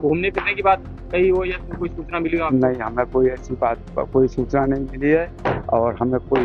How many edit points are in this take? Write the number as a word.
one